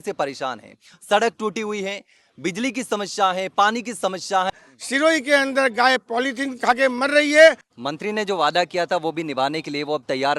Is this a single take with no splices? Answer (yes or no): no